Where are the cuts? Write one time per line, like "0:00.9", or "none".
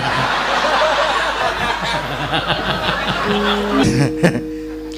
0:03.8